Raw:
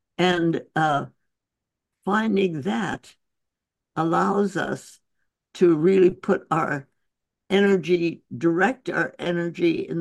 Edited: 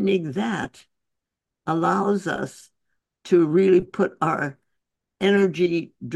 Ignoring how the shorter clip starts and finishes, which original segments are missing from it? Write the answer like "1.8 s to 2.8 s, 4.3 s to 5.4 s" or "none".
none